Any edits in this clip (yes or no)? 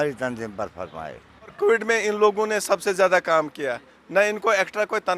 yes